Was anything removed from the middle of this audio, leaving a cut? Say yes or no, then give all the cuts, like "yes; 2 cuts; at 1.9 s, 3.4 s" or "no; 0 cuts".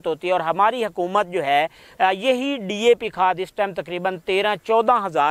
no; 0 cuts